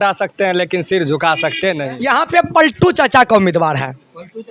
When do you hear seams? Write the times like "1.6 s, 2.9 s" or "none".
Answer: 1.9 s